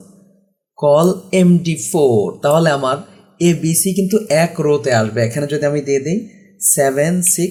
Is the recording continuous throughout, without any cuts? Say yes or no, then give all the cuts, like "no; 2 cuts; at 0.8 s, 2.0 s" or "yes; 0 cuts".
yes; 0 cuts